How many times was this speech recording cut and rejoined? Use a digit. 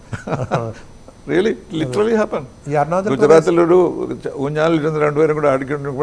0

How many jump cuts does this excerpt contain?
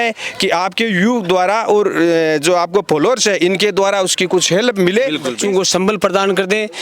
1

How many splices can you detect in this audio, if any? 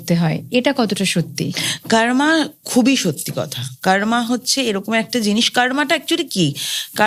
0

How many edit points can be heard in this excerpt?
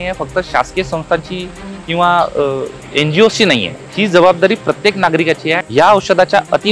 3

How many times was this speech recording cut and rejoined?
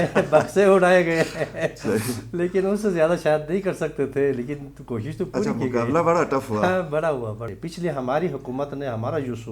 1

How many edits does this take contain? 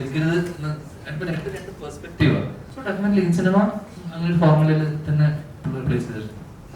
1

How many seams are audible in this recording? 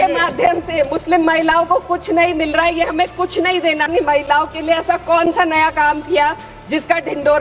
1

